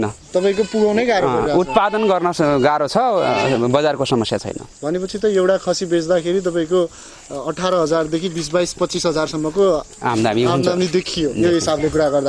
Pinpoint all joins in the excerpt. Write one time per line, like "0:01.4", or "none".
none